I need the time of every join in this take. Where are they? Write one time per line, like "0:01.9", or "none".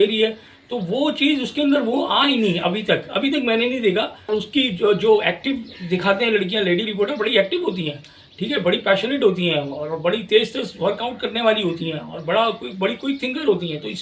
0:04.3